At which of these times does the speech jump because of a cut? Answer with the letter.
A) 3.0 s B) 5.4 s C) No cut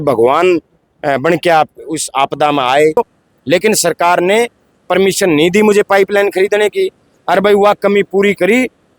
A